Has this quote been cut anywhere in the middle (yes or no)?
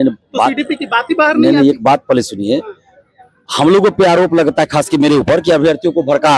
no